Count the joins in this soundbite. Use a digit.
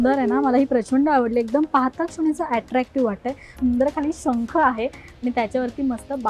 1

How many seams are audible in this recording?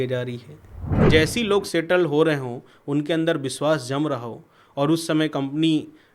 1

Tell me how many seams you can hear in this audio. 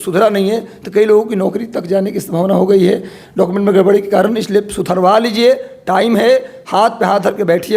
0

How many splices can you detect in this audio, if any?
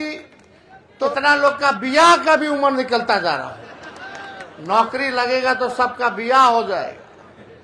1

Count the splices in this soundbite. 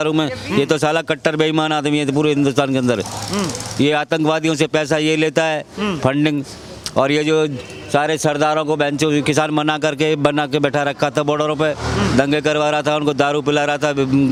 0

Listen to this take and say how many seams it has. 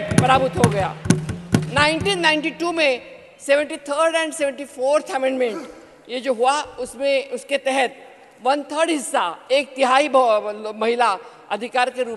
0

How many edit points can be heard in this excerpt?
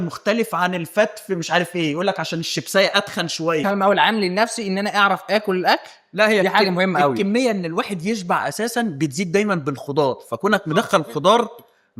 1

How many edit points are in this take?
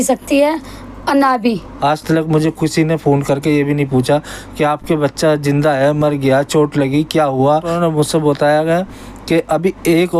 2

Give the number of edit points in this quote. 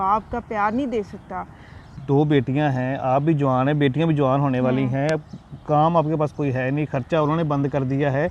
1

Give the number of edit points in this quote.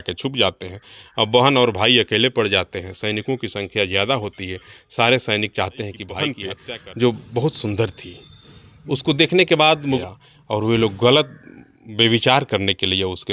2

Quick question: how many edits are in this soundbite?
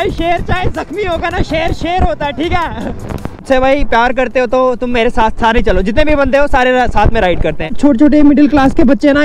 2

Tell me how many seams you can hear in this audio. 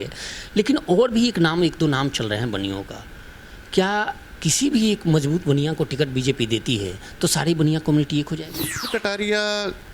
1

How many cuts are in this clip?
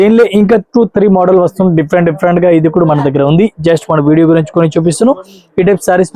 0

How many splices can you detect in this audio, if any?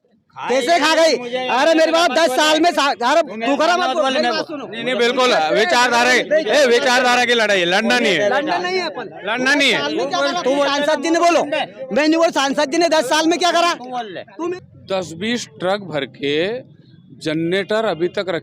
1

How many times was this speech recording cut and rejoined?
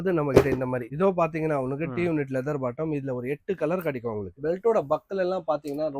2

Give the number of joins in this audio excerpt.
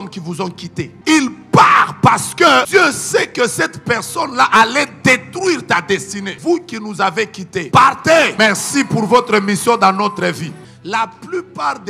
6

